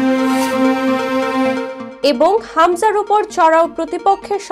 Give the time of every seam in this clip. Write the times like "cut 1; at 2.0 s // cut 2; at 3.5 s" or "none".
none